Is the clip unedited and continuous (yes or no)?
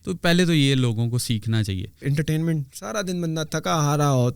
no